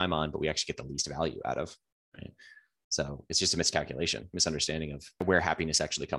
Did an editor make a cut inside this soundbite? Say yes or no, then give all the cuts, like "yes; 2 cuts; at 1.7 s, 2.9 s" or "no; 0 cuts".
yes; 1 cut; at 5.2 s